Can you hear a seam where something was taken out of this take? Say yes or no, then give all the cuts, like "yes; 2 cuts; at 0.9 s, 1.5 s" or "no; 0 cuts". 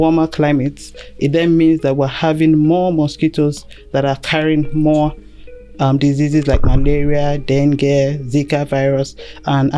no; 0 cuts